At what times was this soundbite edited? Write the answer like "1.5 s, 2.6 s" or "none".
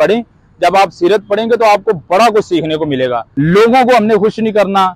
3.3 s